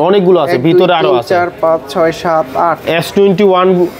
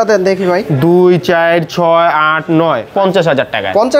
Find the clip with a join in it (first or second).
second